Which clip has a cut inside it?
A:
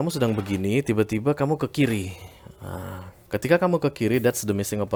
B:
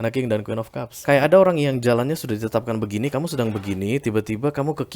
B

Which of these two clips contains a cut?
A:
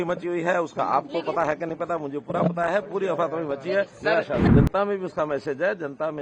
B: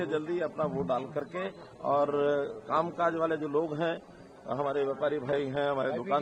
A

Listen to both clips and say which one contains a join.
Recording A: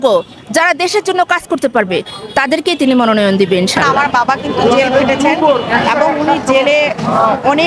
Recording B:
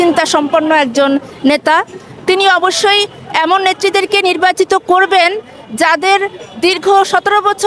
A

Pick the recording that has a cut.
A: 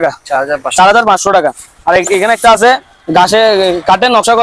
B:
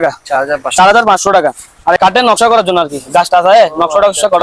B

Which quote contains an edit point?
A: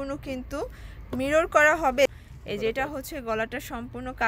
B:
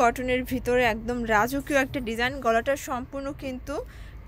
A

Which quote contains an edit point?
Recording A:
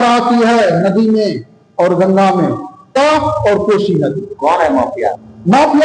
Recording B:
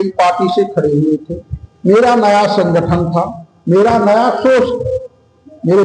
A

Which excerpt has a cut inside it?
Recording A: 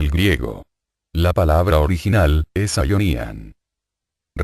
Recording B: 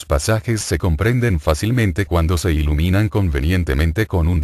A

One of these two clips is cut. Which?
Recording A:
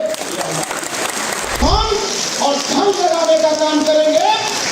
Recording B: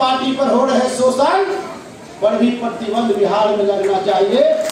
A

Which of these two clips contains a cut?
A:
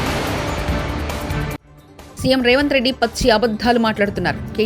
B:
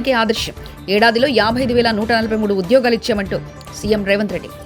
A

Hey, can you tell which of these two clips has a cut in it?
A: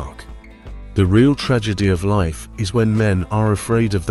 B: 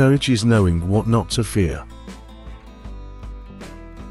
B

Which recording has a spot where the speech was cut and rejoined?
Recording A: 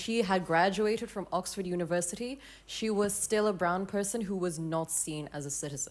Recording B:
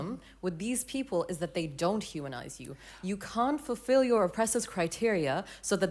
B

